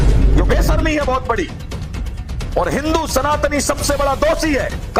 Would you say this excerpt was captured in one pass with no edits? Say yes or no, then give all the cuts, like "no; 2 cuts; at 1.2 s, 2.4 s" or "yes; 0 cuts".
yes; 0 cuts